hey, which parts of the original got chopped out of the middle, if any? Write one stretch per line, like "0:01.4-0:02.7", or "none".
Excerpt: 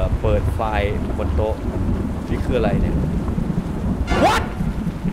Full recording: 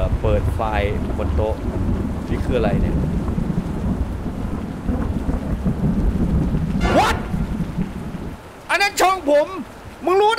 0:04.1-0:06.8